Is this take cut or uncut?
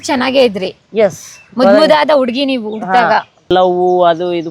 cut